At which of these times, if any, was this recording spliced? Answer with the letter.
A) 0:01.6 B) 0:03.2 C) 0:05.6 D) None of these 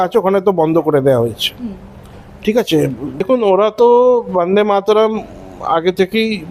B